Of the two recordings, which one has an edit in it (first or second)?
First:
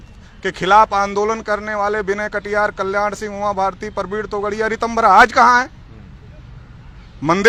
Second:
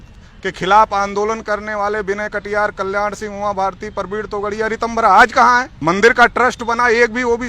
second